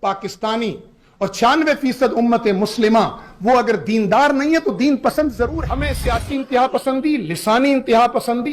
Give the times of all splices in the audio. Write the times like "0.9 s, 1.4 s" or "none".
5.5 s

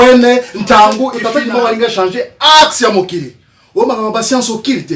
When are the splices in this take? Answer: 1.1 s

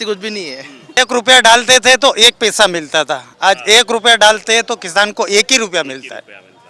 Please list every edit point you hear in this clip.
0.9 s

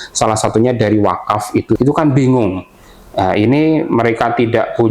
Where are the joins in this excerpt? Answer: 1.8 s

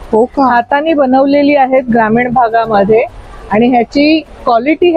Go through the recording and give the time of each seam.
none

